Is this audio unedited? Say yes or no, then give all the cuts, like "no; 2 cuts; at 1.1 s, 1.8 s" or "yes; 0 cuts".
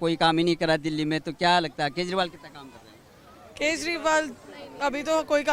yes; 0 cuts